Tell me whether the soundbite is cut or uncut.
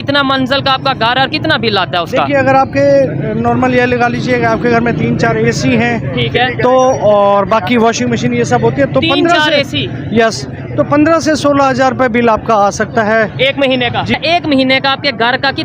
cut